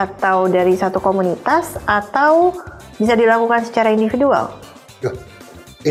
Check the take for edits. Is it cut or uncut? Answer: uncut